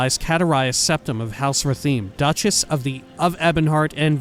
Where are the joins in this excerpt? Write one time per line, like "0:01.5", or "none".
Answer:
none